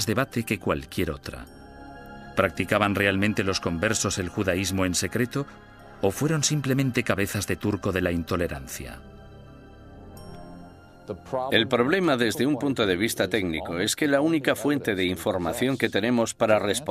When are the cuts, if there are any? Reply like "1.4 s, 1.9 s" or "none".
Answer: none